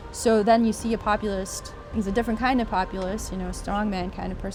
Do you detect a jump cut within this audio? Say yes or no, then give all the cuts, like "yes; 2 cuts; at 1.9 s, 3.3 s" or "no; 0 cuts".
no; 0 cuts